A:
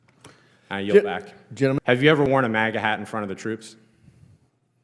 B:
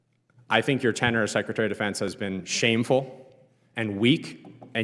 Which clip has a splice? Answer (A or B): A